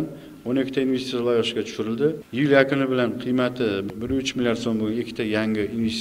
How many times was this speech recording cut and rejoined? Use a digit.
2